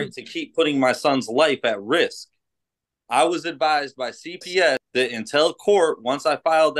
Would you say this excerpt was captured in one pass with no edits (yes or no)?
no